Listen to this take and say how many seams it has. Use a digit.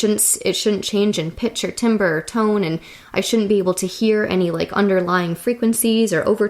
0